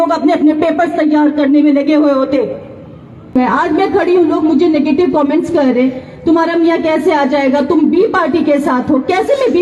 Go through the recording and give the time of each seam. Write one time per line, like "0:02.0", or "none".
0:03.4